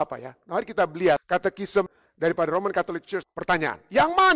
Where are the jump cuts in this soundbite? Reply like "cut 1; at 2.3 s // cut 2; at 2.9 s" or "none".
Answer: cut 1; at 1.6 s // cut 2; at 3.2 s